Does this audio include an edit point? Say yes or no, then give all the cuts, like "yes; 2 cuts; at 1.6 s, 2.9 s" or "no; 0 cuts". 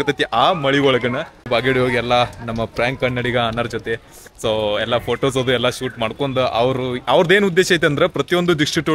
yes; 1 cut; at 1.5 s